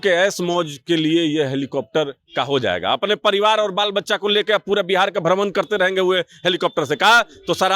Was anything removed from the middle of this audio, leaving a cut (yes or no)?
no